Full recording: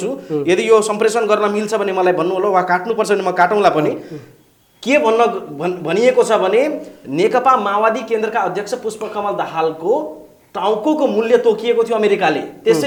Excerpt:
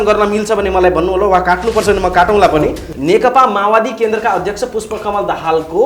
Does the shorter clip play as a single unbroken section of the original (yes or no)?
no